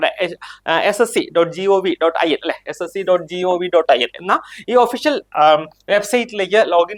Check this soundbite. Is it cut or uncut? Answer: uncut